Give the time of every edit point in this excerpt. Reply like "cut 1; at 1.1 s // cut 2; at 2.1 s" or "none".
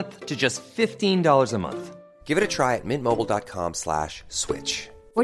none